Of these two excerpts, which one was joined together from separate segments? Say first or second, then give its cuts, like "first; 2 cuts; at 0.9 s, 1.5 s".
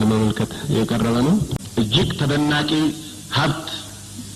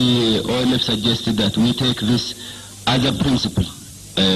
first; 1 cut; at 1.6 s